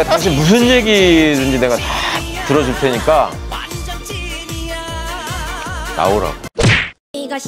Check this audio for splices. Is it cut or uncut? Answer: uncut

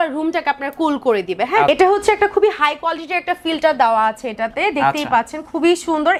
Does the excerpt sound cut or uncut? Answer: uncut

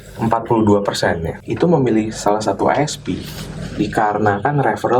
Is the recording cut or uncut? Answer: cut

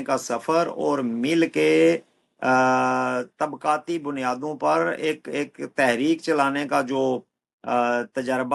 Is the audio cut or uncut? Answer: uncut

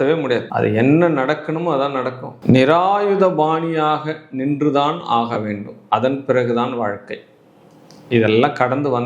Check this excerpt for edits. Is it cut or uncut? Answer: uncut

